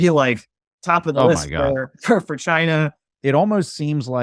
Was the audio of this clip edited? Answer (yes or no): yes